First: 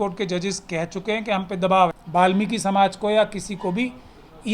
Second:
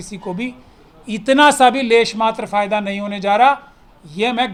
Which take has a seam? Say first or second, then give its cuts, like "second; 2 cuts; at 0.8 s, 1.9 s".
first; 1 cut; at 2.0 s